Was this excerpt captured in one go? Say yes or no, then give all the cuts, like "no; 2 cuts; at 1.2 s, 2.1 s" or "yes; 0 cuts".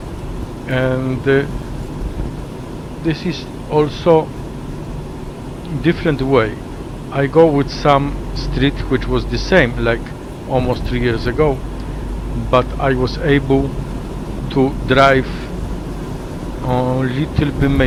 yes; 0 cuts